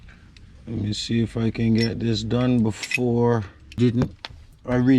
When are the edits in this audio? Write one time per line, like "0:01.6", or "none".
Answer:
0:03.8

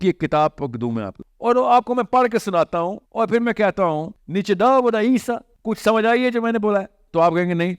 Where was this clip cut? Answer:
0:01.1
0:03.0
0:04.2
0:05.5

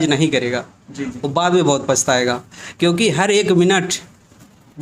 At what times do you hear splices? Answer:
none

